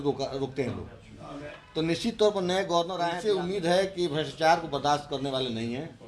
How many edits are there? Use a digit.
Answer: 1